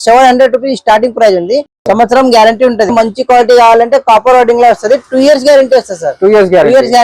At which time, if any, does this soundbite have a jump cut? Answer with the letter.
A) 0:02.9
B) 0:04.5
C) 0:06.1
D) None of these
A